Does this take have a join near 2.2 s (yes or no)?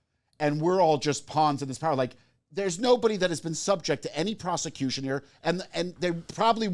no